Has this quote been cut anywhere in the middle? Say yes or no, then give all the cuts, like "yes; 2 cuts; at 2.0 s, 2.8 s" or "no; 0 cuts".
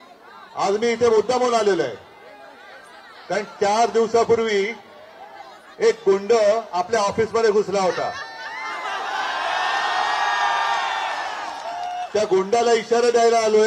no; 0 cuts